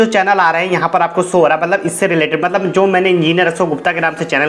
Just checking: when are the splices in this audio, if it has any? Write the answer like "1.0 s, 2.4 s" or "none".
none